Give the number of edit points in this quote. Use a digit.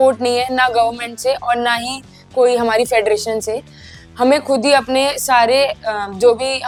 0